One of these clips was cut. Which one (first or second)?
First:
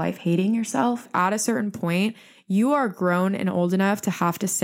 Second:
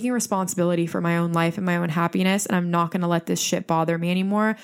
first